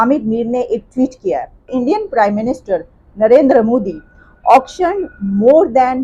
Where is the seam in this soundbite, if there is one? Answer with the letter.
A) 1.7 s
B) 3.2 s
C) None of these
A